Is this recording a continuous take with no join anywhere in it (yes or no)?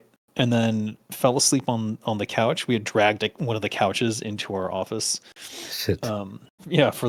yes